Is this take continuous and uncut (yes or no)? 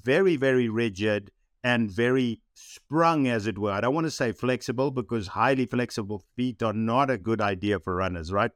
no